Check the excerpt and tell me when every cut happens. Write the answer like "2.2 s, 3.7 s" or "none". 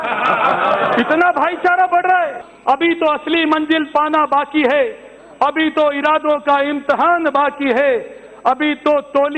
2.5 s